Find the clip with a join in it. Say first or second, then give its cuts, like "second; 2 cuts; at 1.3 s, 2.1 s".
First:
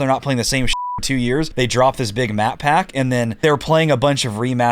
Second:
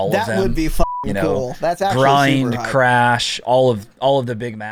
first; 2 cuts; at 1.5 s, 3.3 s